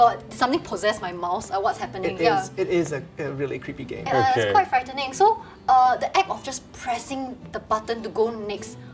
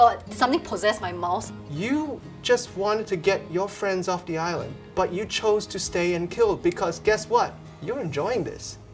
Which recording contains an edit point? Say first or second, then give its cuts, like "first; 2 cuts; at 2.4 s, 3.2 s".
second; 3 cuts; at 1.5 s, 4.8 s, 7.7 s